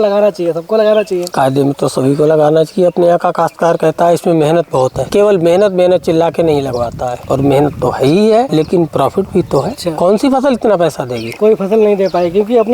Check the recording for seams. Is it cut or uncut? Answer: uncut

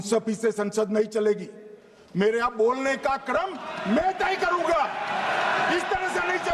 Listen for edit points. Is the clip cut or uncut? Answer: uncut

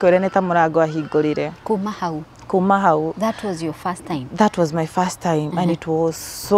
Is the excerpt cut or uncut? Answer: uncut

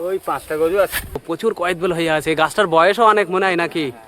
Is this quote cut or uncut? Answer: cut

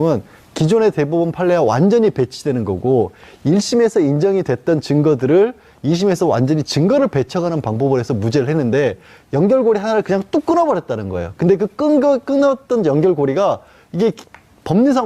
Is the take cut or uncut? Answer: cut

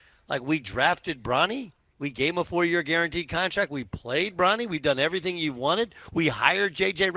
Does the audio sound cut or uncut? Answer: uncut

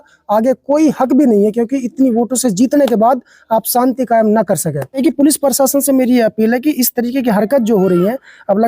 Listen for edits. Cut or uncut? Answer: cut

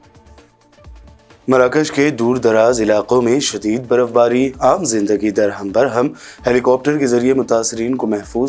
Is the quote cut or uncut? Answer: uncut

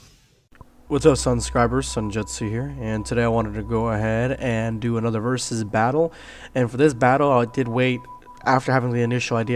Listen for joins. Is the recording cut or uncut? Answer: uncut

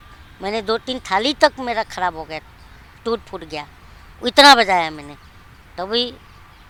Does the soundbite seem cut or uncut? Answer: uncut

